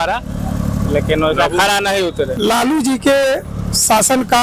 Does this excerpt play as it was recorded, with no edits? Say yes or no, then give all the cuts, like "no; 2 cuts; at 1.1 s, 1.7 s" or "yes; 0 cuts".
no; 1 cut; at 2.4 s